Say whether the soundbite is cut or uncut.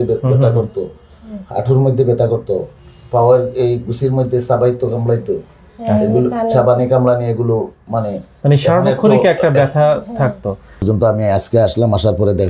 cut